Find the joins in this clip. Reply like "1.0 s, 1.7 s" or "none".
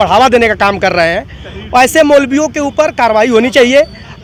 none